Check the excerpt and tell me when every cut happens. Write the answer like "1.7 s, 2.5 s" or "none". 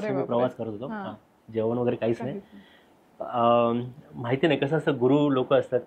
none